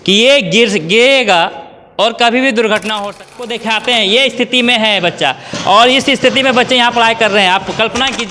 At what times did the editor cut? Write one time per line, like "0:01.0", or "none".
0:03.5